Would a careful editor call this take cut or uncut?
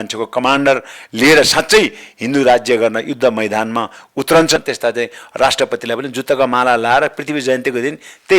cut